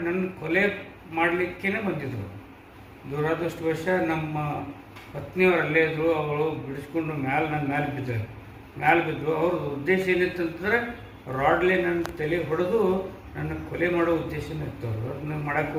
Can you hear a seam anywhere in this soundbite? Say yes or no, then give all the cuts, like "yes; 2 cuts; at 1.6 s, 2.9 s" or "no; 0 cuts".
no; 0 cuts